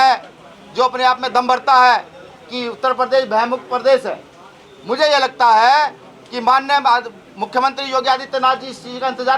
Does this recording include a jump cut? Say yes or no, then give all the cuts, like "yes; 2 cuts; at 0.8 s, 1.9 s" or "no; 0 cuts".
no; 0 cuts